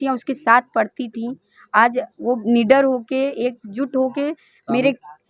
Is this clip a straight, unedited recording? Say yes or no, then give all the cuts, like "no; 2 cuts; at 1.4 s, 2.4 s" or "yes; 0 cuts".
yes; 0 cuts